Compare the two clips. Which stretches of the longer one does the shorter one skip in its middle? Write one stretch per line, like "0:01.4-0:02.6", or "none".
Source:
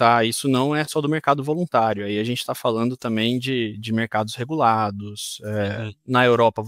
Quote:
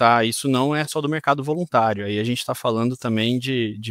none